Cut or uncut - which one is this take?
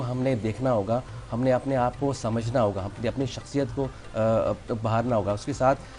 uncut